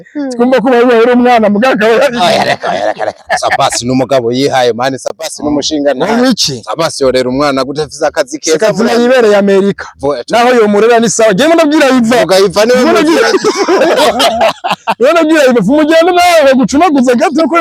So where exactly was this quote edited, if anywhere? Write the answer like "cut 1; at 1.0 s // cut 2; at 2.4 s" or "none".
none